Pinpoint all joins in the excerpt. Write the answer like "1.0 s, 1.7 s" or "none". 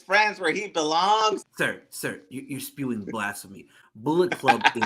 1.5 s